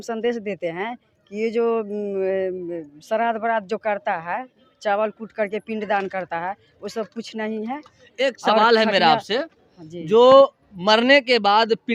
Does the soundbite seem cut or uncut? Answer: uncut